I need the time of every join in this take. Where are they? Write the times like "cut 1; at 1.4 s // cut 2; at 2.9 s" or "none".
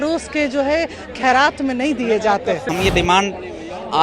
cut 1; at 2.7 s